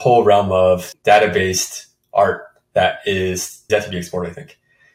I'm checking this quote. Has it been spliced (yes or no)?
yes